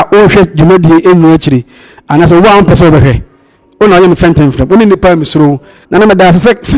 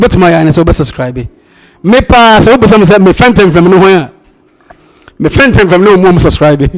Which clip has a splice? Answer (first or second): first